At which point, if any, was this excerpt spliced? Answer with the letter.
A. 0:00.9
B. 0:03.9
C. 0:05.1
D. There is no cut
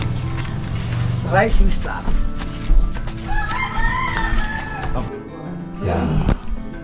C